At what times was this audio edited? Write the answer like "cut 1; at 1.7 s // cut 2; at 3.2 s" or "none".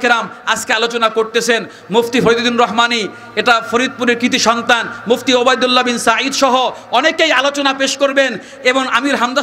none